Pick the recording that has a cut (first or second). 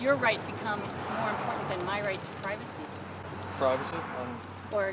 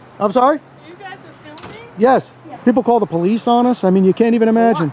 second